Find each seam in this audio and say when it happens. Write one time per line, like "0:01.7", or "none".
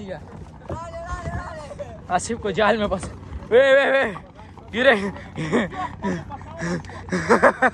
none